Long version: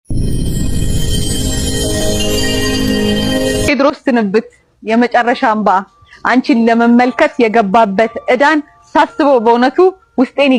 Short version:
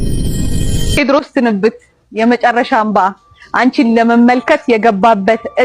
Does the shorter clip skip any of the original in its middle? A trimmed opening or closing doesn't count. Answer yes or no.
yes